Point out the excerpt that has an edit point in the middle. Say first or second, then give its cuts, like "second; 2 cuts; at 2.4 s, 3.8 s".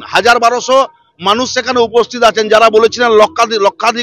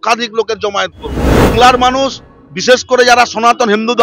second; 1 cut; at 1.5 s